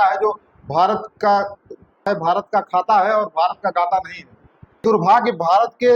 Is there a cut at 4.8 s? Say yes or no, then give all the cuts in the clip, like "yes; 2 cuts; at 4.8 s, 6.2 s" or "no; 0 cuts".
yes; 2 cuts; at 2.1 s, 4.8 s